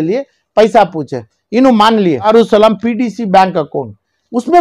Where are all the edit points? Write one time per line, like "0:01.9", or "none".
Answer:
0:02.3